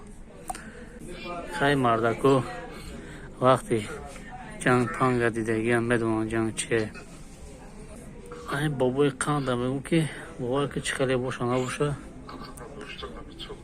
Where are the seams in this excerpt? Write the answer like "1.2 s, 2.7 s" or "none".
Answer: 1.0 s, 7.9 s